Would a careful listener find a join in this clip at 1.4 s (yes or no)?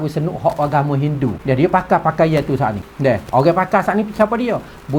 yes